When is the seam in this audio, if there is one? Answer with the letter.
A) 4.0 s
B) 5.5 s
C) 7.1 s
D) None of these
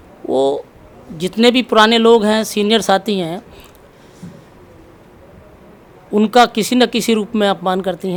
D